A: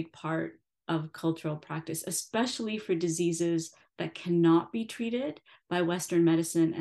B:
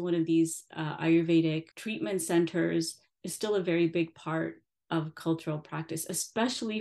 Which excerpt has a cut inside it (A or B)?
B